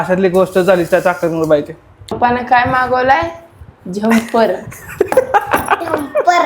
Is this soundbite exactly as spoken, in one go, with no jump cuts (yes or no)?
no